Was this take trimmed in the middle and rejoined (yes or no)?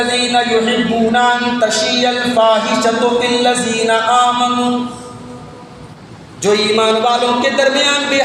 yes